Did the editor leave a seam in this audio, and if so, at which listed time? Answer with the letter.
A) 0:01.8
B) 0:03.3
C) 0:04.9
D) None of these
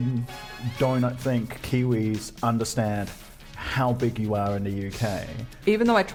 D